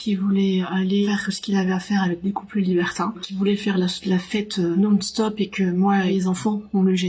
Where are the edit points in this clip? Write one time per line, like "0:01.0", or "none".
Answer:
0:03.3
0:04.7
0:06.1